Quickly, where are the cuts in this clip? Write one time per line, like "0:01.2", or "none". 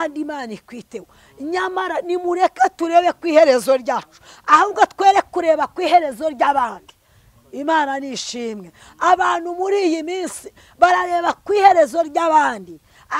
none